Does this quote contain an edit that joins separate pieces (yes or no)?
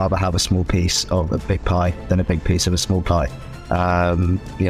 no